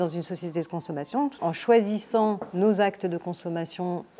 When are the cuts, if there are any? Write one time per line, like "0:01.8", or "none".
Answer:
0:01.4